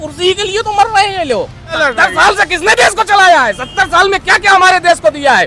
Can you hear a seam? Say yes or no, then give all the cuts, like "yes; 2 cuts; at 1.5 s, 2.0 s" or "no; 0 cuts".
yes; 1 cut; at 1.8 s